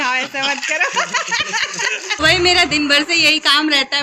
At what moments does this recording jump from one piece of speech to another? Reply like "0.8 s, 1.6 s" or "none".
2.1 s